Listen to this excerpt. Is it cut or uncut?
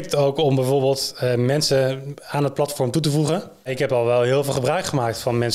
cut